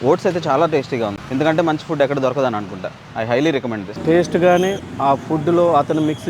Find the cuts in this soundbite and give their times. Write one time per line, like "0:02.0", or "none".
0:01.2
0:03.9